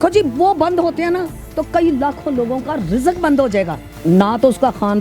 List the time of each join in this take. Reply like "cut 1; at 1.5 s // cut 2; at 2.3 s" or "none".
cut 1; at 3.8 s